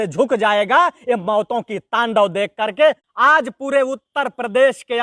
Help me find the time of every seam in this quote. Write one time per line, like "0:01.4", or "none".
0:03.0

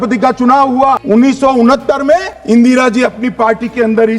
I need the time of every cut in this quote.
0:01.0
0:02.3

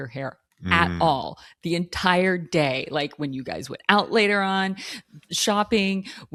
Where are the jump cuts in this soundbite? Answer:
none

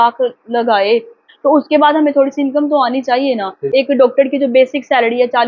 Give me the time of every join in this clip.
0:01.2
0:03.6

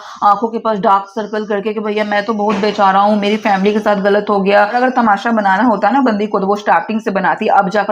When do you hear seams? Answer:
0:04.8

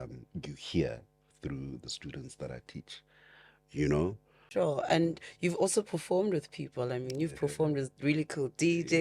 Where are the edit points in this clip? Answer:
0:04.3

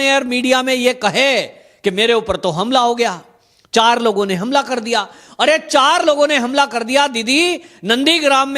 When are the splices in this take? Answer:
none

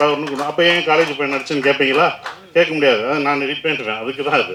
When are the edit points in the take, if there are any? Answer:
none

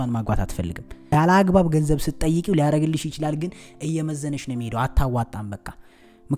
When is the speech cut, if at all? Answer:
0:01.0

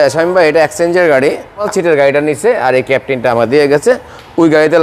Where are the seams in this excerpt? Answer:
0:01.6

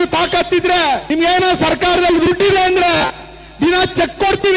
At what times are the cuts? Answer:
0:01.0

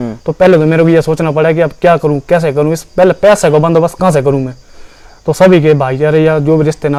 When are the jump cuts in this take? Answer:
none

